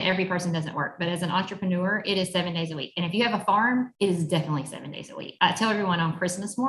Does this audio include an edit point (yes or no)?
yes